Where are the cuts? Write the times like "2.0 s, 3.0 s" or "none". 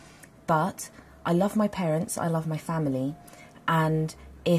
3.0 s